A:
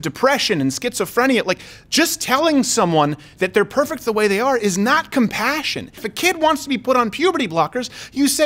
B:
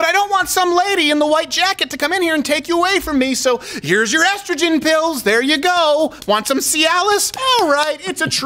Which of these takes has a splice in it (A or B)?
A